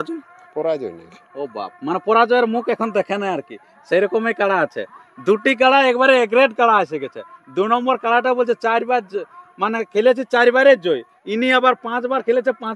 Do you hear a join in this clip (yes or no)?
no